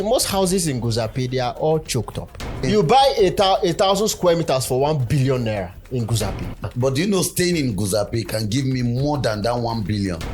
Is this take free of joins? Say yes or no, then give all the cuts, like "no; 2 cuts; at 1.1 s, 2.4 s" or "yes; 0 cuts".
no; 2 cuts; at 2.6 s, 6.6 s